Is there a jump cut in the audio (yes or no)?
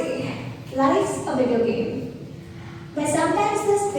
no